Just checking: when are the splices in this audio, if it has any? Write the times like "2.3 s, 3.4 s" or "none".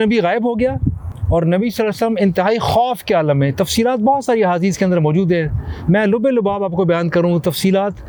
none